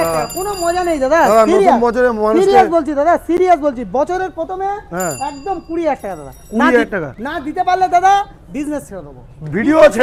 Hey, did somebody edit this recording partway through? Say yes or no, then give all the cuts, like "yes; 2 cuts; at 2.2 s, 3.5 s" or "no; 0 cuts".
no; 0 cuts